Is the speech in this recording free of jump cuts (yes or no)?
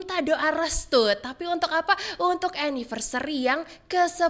yes